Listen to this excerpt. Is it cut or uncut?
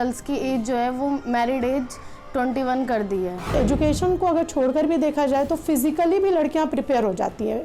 cut